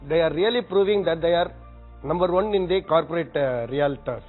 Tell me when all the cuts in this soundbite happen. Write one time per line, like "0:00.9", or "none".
none